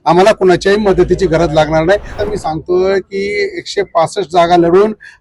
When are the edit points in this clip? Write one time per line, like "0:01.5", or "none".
0:02.2